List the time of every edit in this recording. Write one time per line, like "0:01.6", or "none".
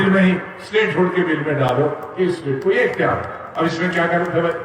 none